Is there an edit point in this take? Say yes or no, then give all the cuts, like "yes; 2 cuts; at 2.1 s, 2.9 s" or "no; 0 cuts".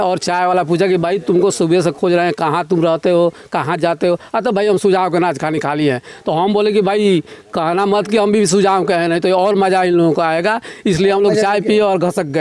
no; 0 cuts